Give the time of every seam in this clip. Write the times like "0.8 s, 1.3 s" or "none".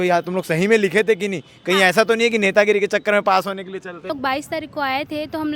4.1 s

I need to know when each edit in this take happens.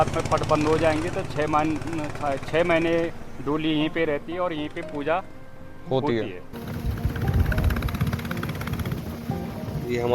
6.6 s

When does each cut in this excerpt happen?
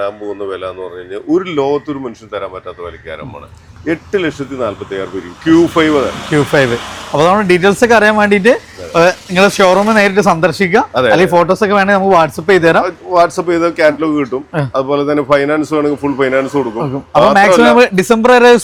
none

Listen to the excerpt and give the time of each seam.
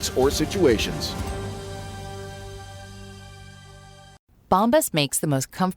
4.3 s

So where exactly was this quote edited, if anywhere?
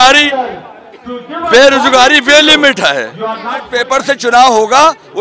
3.7 s

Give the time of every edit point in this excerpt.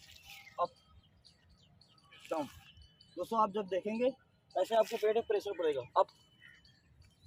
none

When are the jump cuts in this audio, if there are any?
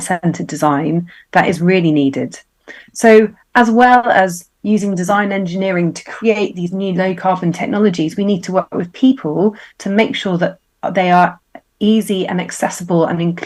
none

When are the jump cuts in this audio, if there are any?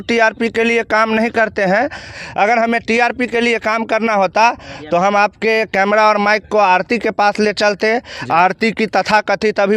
2.1 s

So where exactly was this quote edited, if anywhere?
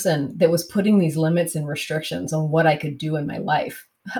none

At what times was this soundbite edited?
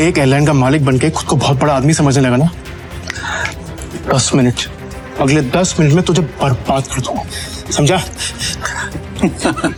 none

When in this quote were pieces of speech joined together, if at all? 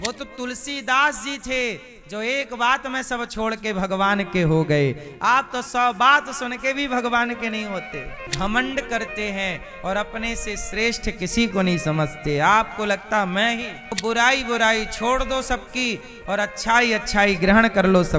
8.2 s, 14.0 s

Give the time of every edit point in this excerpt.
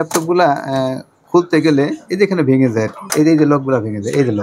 3.1 s

